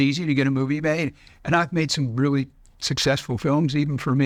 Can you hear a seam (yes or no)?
no